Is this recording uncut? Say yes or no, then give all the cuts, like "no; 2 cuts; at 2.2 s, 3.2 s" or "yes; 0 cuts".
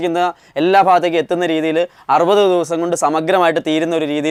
yes; 0 cuts